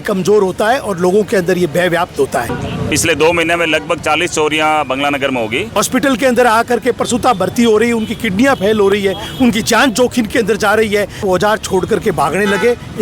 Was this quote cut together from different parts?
yes; 3 cuts; at 2.6 s, 5.8 s, 11.2 s

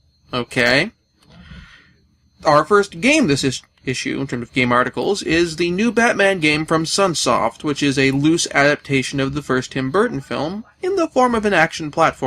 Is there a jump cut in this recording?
yes; 1 cut; at 6.7 s

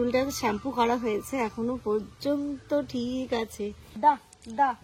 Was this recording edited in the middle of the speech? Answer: yes; 1 cut; at 3.9 s

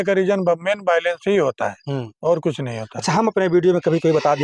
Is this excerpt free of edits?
yes; 0 cuts

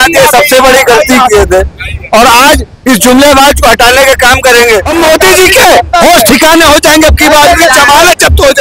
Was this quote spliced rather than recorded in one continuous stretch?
yes; 1 cut; at 4.9 s

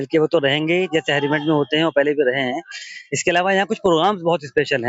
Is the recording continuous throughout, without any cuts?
yes; 0 cuts

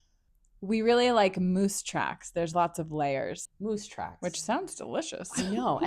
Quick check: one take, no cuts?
no; 1 cut; at 3.5 s

